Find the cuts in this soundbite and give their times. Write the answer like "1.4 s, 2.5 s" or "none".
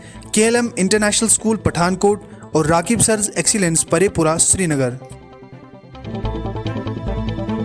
6.1 s